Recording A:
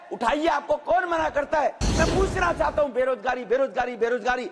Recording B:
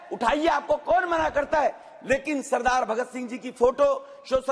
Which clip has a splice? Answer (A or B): A